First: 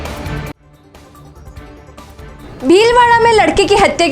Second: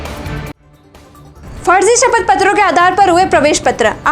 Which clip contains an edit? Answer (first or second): first